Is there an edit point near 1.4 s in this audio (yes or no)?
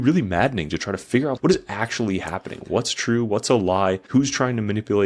yes